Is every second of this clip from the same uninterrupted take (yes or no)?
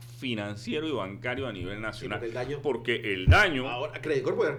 yes